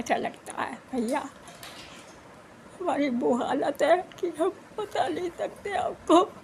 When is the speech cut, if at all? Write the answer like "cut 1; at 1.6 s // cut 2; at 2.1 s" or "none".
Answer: none